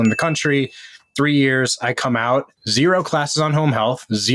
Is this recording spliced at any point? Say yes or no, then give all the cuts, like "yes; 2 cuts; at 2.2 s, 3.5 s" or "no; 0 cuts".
yes; 1 cut; at 2.6 s